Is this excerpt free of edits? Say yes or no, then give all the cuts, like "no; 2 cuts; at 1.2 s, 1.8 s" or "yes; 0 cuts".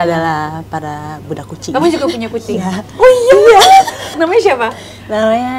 no; 1 cut; at 4.2 s